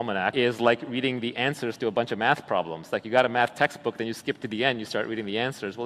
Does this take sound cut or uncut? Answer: uncut